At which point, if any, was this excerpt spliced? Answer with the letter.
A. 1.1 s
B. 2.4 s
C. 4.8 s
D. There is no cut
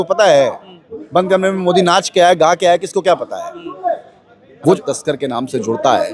C